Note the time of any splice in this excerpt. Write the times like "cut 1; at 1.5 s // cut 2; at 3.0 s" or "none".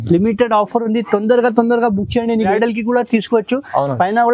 cut 1; at 2.5 s